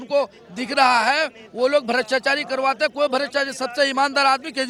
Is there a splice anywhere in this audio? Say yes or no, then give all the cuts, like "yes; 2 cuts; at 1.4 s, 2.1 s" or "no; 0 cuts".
no; 0 cuts